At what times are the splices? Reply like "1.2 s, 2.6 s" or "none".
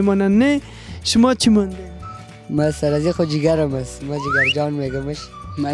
none